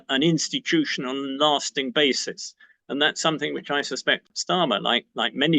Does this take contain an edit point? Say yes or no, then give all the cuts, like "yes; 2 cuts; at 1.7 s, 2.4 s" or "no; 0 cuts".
yes; 1 cut; at 4.3 s